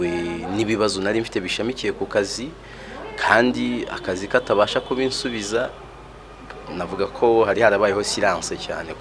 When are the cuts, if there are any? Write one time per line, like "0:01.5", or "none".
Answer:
none